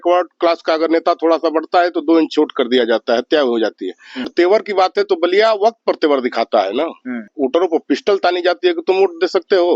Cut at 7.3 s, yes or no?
yes